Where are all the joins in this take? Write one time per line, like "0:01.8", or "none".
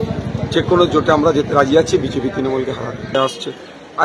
0:03.1

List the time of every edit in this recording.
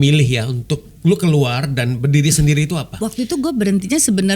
0:02.9

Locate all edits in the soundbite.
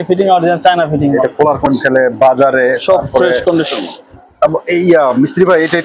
0:01.7

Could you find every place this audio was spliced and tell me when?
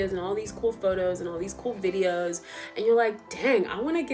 none

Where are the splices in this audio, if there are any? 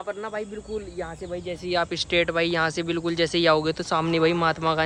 none

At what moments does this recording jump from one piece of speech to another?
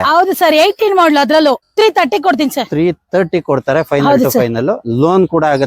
0:01.7

